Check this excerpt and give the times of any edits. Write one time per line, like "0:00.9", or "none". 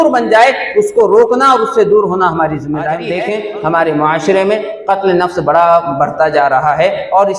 0:03.1